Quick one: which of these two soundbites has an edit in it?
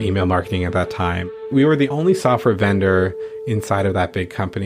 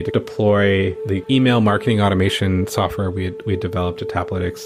first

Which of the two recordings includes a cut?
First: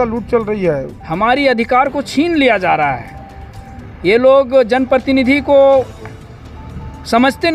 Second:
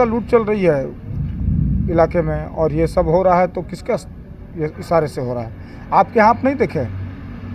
first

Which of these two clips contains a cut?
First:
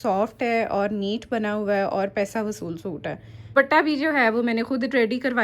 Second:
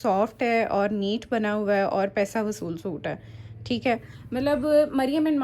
first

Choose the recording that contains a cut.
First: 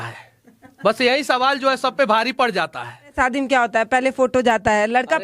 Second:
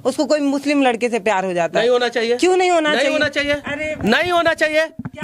first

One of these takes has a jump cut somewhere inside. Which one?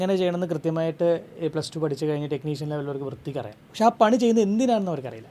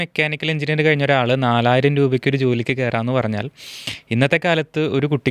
first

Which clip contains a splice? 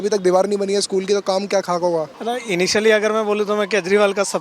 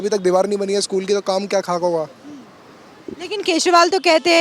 first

